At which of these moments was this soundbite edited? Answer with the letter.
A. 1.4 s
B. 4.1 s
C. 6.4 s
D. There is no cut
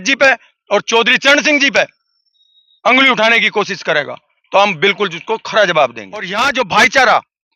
C